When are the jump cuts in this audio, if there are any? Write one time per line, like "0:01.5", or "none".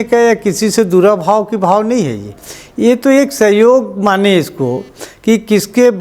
none